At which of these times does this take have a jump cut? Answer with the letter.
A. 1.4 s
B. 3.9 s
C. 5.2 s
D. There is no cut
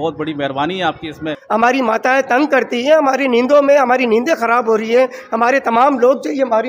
A